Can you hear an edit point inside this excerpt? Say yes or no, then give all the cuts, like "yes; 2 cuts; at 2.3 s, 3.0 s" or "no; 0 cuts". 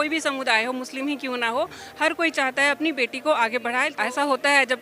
yes; 1 cut; at 3.9 s